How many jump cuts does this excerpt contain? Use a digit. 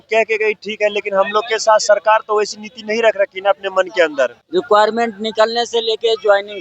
1